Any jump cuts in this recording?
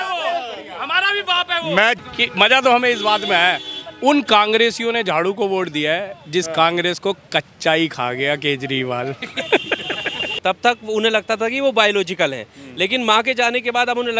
yes; 2 cuts; at 2.0 s, 10.3 s

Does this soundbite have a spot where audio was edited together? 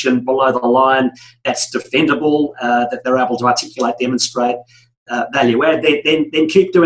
no; 0 cuts

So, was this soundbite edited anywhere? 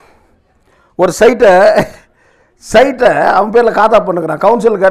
no; 0 cuts

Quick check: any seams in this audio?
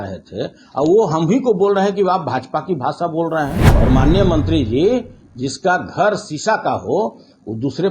yes; 1 cut; at 3.6 s

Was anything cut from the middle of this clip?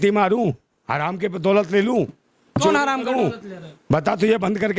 no; 0 cuts

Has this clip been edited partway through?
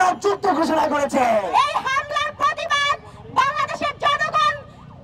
yes; 1 cut; at 1.5 s

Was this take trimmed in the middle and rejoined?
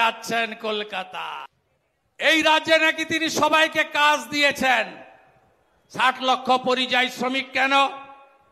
yes; 1 cut; at 1.3 s

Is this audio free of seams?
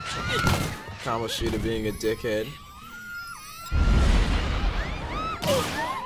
yes; 0 cuts

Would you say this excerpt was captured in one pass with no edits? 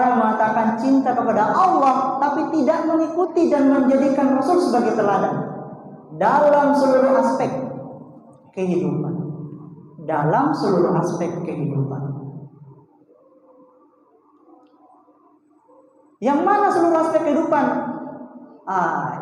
yes; 0 cuts

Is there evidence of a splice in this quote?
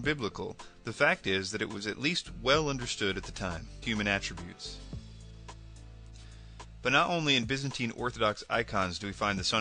no; 0 cuts

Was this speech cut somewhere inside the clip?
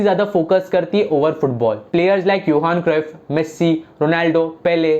yes; 1 cut; at 1.8 s

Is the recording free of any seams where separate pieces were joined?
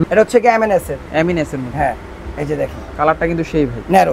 yes; 0 cuts

